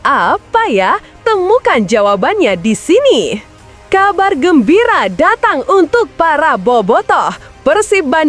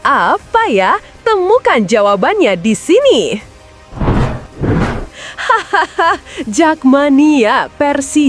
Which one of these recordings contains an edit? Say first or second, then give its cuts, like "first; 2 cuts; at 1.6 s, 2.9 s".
second; 1 cut; at 3.7 s